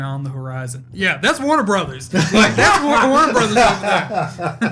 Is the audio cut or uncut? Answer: uncut